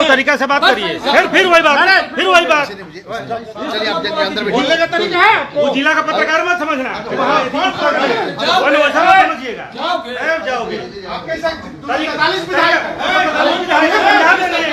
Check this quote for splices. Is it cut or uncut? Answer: uncut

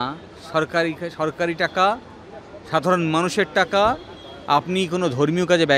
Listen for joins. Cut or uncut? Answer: uncut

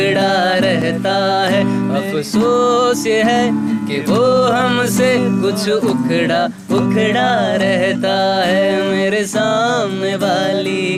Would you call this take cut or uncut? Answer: uncut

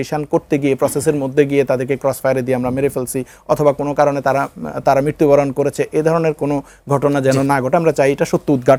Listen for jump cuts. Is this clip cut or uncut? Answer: uncut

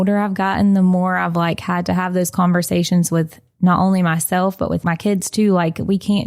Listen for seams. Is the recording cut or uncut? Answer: cut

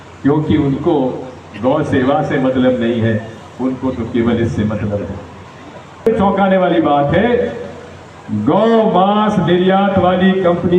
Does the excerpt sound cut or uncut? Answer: cut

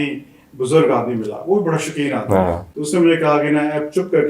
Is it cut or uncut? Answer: cut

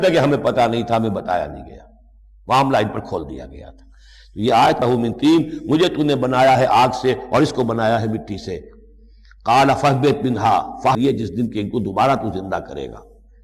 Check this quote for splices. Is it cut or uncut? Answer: cut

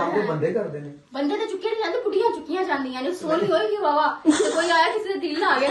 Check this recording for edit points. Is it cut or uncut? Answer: uncut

